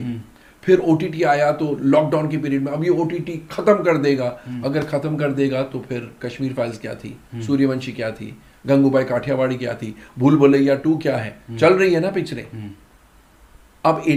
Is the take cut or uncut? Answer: uncut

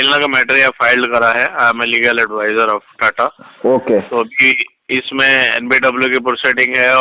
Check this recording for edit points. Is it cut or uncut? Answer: uncut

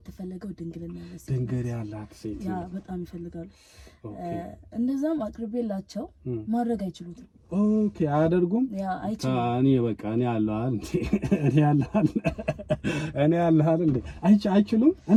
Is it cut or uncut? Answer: uncut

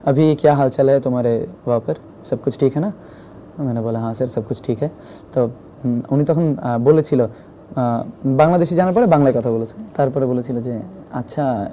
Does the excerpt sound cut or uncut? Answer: uncut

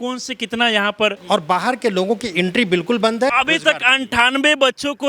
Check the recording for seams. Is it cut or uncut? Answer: cut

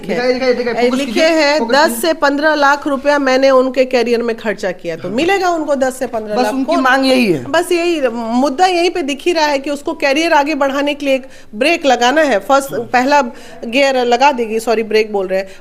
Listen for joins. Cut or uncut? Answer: uncut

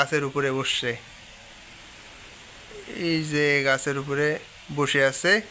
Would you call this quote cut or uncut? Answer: uncut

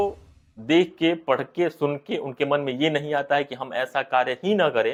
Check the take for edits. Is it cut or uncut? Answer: uncut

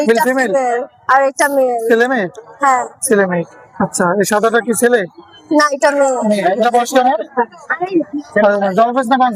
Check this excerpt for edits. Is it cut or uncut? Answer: uncut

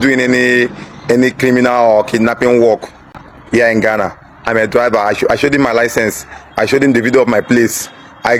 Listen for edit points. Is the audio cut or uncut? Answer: uncut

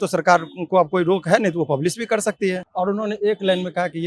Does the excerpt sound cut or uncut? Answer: cut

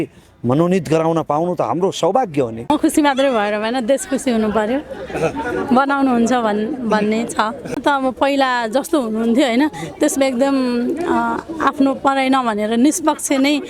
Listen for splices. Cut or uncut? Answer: cut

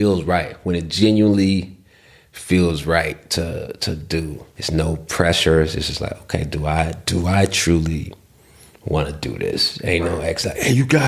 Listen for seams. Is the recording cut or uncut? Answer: cut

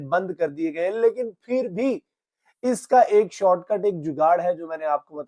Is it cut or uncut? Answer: uncut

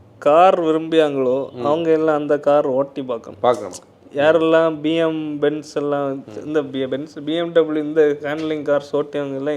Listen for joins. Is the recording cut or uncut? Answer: uncut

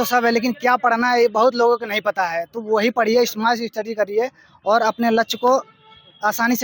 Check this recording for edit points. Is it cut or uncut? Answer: uncut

